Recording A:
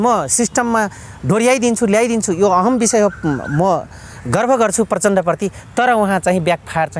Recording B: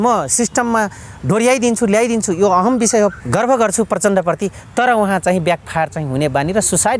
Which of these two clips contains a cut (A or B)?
B